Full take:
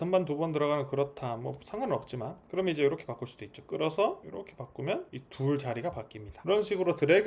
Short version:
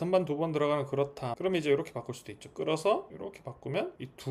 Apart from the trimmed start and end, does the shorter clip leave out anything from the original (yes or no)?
yes